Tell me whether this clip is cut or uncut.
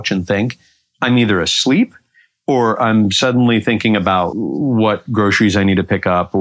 cut